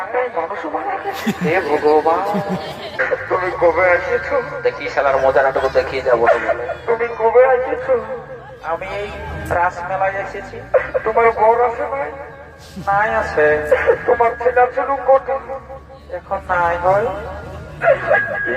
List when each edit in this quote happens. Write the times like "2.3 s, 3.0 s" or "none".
3.0 s

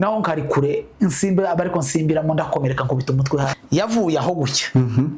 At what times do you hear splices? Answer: 3.5 s

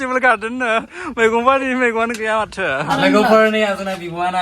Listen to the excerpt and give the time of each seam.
2.9 s

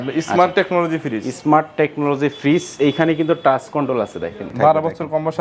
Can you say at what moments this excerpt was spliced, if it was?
4.5 s

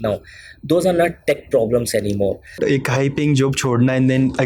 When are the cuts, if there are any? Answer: 2.6 s

